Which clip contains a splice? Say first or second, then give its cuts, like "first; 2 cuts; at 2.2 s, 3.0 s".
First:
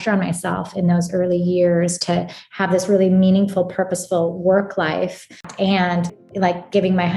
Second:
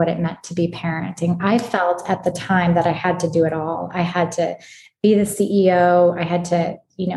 first; 2 cuts; at 5.4 s, 6.2 s